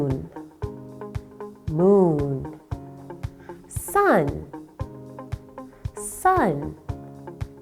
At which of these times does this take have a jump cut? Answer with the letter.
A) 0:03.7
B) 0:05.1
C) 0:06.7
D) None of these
C